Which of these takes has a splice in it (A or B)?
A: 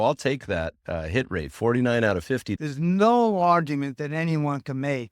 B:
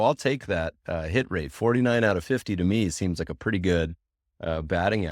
A